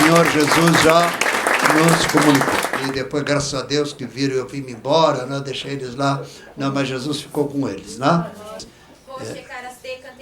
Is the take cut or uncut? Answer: cut